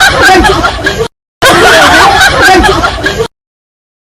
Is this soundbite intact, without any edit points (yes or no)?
yes